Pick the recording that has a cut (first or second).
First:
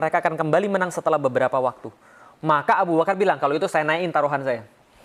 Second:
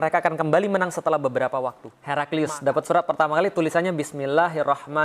second